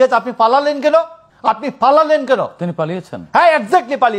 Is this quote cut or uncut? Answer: cut